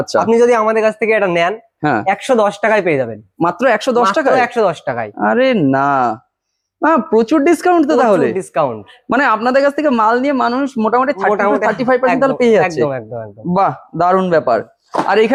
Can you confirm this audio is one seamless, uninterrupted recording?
yes; 0 cuts

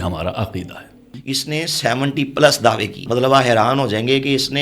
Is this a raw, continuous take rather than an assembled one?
no; 2 cuts; at 1.1 s, 3.0 s

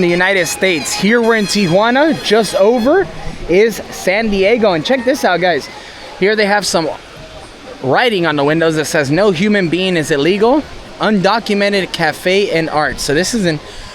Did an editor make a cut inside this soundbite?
no; 0 cuts

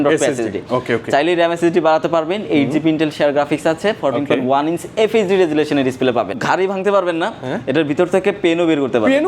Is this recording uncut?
no; 1 cut; at 6.4 s

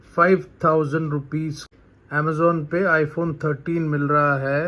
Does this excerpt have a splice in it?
yes; 1 cut; at 1.6 s

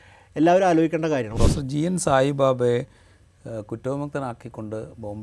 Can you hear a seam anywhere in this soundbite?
yes; 1 cut; at 1.3 s

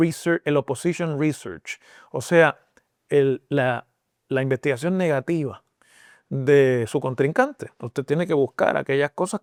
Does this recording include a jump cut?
no; 0 cuts

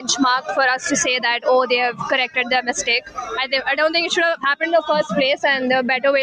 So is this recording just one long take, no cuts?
yes; 0 cuts

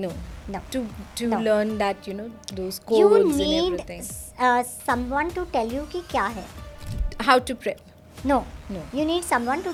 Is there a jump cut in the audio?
no; 0 cuts

